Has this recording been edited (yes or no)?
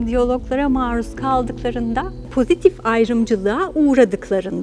yes